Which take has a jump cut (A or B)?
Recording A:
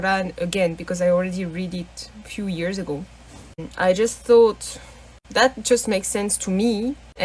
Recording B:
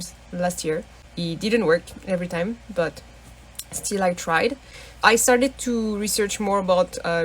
B